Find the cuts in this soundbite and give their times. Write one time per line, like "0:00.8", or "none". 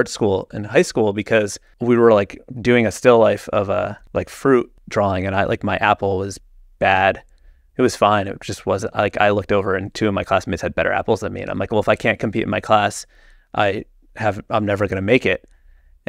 0:01.6
0:04.0
0:04.8